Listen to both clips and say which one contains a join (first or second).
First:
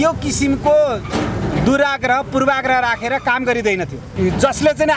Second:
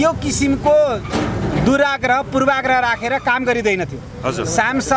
first